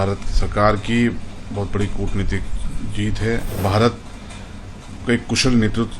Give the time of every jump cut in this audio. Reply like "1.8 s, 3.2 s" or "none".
3.6 s